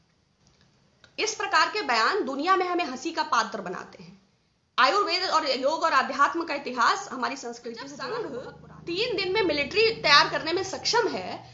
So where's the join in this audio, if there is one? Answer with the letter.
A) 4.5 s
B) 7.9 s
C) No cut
B